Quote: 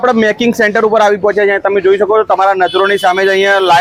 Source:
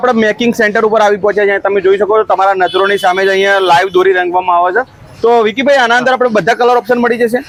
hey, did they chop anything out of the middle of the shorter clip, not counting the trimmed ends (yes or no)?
no